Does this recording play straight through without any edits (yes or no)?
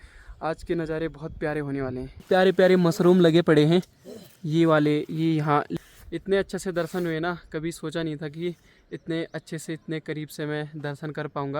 no